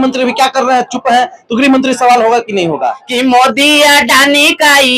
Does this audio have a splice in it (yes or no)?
yes